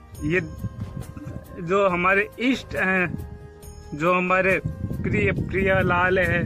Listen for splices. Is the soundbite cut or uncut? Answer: uncut